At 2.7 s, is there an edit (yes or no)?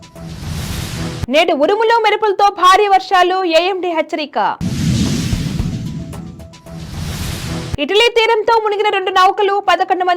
no